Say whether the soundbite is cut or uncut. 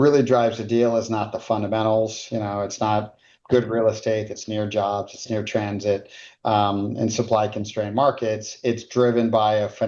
uncut